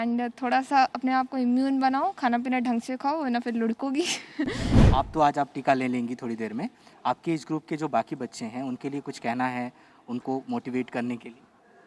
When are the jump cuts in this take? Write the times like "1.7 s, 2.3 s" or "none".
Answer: 4.7 s